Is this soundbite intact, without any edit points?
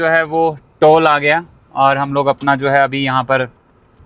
yes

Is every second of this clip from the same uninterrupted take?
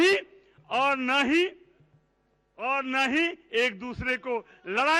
yes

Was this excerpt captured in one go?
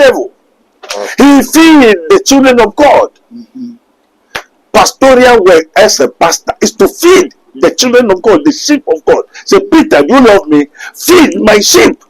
yes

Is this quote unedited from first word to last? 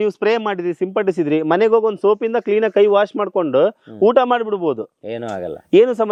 yes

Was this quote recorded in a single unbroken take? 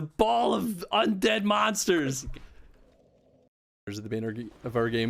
no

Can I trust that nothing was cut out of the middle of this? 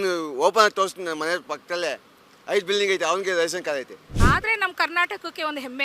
no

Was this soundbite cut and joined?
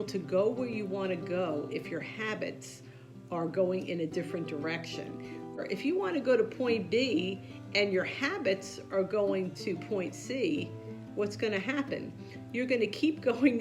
yes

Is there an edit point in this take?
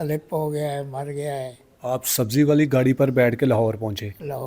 yes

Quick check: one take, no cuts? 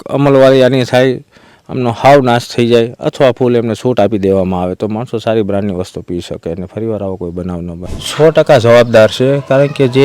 no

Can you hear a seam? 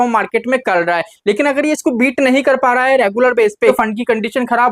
yes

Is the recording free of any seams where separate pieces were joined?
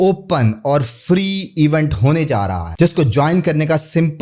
no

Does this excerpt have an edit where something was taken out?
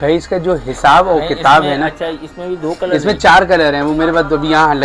no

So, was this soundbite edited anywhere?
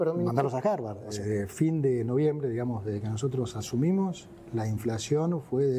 yes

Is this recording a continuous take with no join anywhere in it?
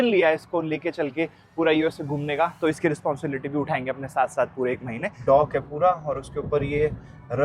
no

